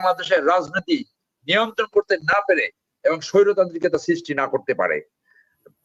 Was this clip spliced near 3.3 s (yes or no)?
no